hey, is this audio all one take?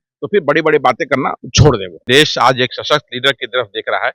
no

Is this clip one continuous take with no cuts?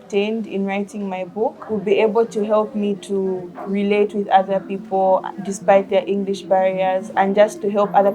no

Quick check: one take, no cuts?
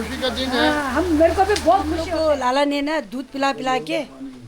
no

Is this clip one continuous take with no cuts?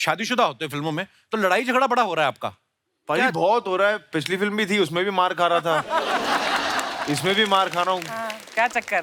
yes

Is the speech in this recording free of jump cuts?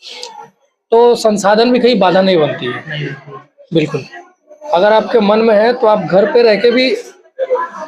yes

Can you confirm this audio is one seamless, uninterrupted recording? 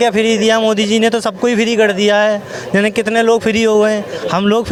yes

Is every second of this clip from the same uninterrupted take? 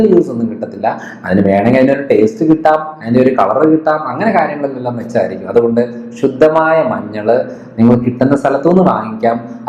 yes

